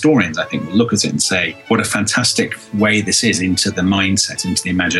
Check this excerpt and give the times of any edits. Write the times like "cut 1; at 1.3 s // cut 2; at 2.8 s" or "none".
cut 1; at 1.5 s